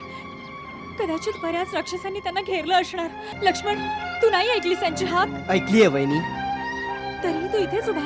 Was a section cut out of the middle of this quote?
yes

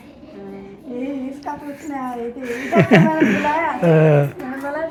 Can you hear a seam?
no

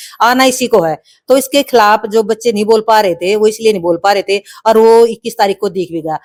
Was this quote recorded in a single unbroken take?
yes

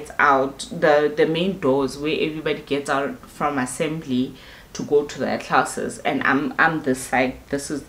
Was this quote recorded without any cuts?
yes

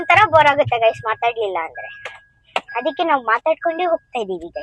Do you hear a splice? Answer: no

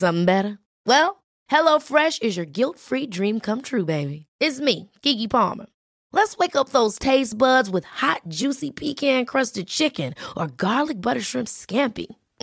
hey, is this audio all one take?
yes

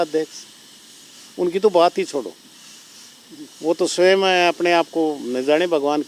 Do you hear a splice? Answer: no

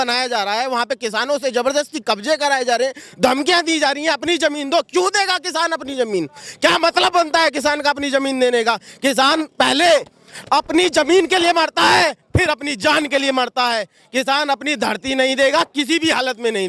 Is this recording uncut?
yes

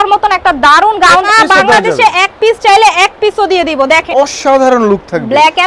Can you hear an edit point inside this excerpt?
yes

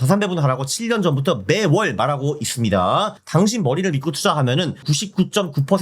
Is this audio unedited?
no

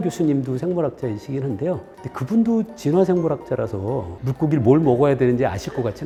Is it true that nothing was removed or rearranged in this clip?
yes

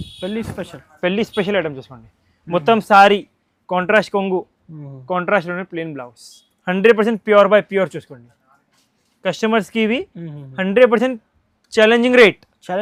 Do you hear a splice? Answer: no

